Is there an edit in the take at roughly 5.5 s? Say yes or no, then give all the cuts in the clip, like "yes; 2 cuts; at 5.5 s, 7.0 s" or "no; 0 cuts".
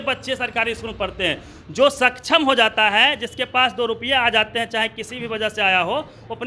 no; 0 cuts